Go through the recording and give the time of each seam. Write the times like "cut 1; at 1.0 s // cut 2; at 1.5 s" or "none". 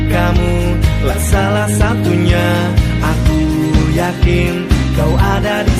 none